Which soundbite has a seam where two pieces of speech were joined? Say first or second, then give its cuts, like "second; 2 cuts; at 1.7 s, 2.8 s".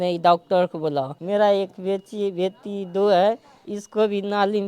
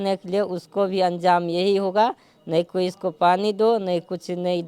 first; 1 cut; at 1.2 s